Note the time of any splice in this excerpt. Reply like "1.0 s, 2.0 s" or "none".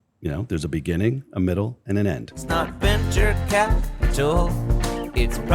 2.3 s